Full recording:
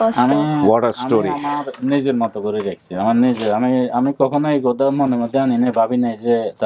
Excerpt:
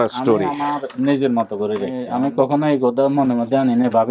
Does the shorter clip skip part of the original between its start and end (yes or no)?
yes